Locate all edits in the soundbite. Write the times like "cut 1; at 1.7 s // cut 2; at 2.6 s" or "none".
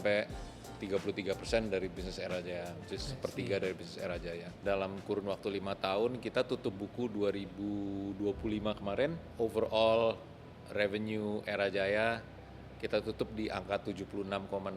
cut 1; at 4.6 s // cut 2; at 9.2 s